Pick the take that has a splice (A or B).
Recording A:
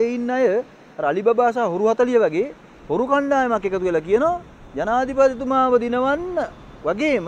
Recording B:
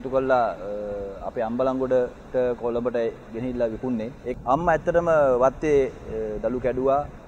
B